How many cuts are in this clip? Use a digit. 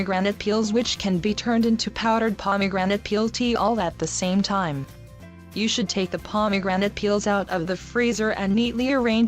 1